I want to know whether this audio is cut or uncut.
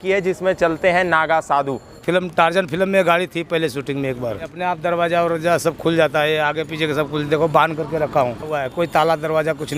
cut